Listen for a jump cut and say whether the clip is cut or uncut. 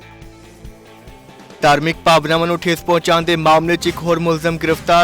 cut